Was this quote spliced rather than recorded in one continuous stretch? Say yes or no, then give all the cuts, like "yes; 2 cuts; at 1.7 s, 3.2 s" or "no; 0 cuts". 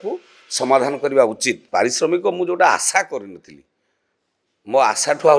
yes; 1 cut; at 1.6 s